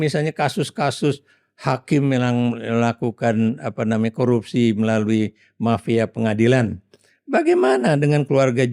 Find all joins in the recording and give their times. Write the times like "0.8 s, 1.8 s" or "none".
none